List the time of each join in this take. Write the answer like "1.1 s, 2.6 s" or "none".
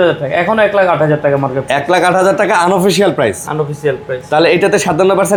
none